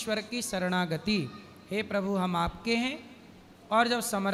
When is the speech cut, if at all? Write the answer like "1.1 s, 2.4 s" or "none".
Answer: none